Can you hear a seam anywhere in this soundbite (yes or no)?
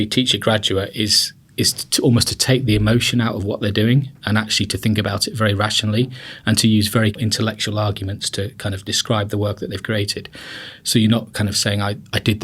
yes